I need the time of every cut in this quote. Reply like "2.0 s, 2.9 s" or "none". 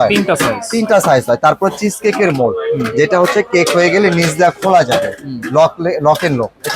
none